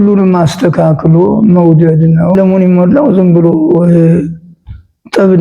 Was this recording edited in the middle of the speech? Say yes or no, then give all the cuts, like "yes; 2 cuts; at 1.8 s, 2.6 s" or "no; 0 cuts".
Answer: yes; 1 cut; at 2.3 s